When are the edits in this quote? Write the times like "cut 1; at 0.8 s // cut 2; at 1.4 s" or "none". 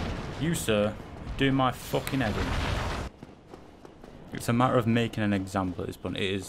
cut 1; at 3.1 s